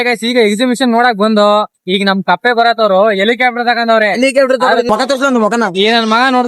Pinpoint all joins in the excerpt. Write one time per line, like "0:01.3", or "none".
0:04.9